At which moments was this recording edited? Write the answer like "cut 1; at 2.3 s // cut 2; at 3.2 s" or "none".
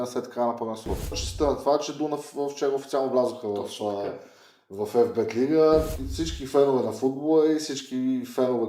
cut 1; at 1.2 s // cut 2; at 6.0 s